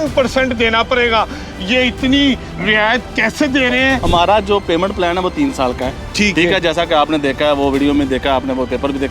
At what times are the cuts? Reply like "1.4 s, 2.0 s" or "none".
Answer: 4.0 s

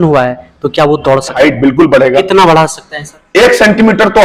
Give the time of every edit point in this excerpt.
1.3 s

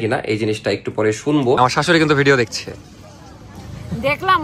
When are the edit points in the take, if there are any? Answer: 1.6 s

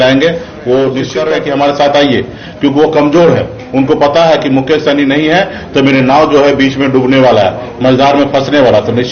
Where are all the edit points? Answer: 1.1 s

